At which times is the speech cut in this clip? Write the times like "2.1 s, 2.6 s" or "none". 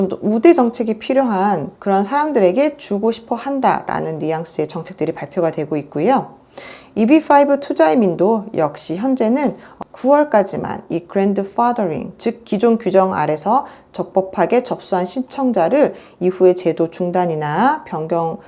none